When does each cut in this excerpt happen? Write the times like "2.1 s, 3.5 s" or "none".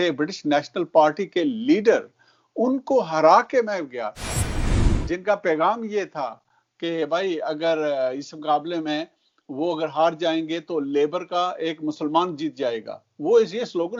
none